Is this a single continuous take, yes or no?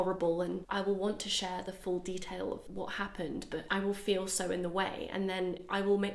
no